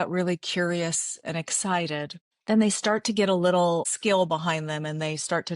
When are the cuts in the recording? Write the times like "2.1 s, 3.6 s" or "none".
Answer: 2.3 s, 3.9 s